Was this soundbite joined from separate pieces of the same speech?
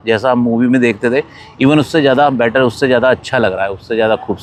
no; 0 cuts

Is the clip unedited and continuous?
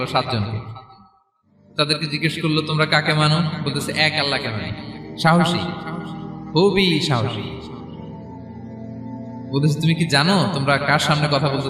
no; 2 cuts; at 7.9 s, 9.5 s

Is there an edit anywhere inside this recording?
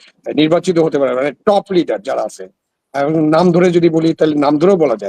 no; 0 cuts

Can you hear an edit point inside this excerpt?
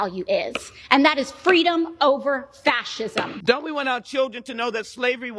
yes; 1 cut; at 3.3 s

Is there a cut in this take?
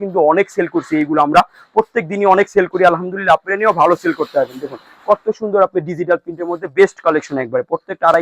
no; 0 cuts

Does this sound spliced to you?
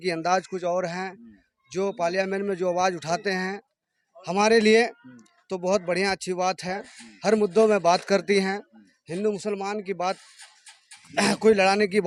no; 0 cuts

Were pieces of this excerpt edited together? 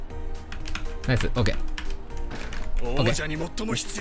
no; 0 cuts

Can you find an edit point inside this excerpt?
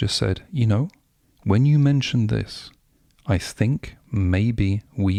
no; 0 cuts

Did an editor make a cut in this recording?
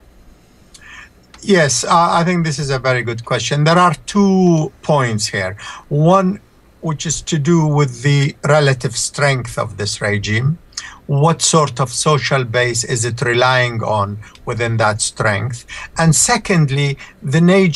no; 0 cuts

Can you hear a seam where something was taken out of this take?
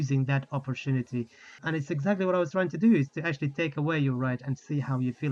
yes; 1 cut; at 1.6 s

